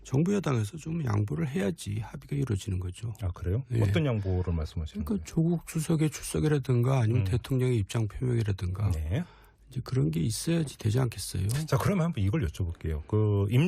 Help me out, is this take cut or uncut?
cut